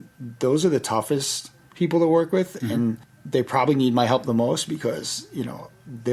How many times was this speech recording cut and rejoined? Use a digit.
1